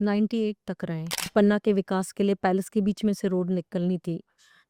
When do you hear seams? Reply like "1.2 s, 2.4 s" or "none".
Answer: 1.3 s